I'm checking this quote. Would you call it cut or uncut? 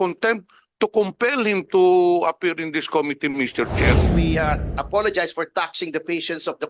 cut